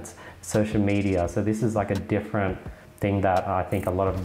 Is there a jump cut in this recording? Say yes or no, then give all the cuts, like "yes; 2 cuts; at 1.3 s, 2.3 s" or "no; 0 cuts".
yes; 1 cut; at 2.8 s